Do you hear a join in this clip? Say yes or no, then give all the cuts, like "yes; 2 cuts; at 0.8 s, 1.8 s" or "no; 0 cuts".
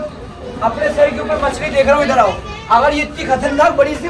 no; 0 cuts